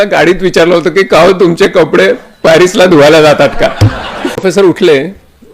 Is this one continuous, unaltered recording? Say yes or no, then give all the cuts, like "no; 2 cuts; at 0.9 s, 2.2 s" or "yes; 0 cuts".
no; 1 cut; at 4.5 s